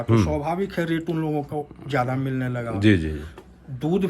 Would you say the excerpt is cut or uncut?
uncut